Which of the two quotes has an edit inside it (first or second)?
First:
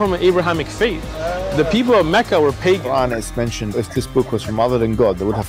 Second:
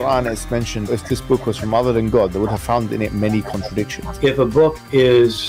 second